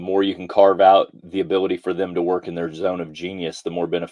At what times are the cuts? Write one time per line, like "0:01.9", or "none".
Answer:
0:01.2